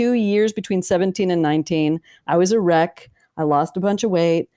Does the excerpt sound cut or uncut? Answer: uncut